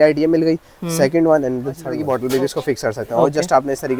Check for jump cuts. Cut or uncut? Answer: cut